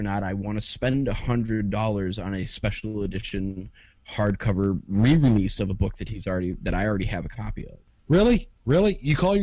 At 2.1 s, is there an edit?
no; 1 cut; at 7.9 s

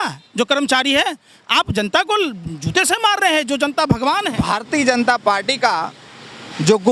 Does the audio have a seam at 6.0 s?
no; 1 cut; at 4.3 s

